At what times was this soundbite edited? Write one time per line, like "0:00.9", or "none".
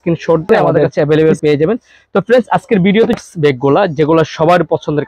0:00.9
0:03.2